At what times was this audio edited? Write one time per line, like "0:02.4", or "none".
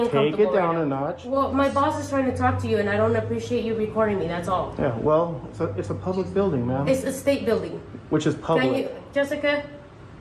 0:01.2